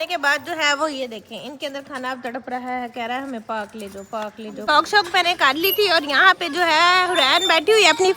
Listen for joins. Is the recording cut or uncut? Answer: cut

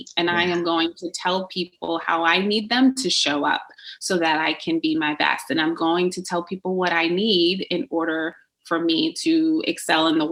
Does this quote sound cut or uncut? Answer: uncut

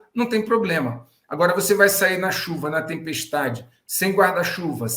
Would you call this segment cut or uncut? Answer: uncut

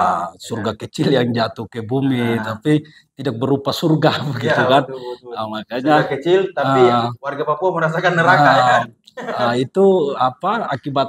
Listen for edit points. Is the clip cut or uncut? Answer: uncut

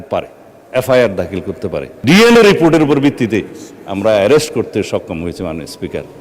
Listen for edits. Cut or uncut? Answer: cut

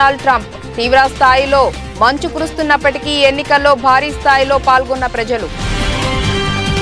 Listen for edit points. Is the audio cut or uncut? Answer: cut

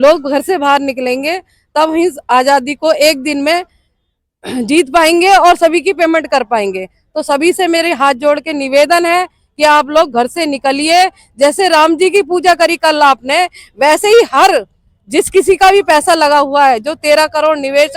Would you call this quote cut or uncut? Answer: uncut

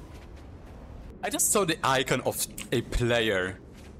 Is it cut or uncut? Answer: cut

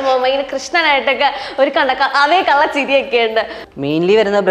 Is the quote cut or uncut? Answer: cut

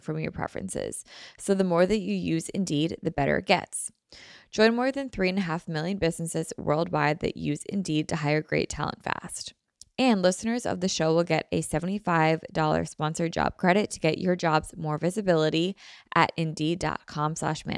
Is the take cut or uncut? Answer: uncut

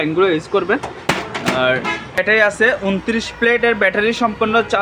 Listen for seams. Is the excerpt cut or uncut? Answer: cut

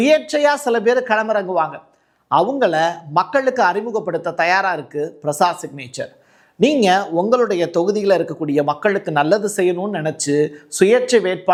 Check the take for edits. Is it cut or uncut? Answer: uncut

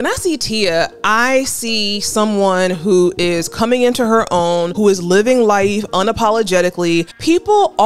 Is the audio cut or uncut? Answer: uncut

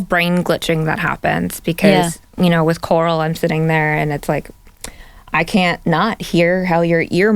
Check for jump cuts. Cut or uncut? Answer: uncut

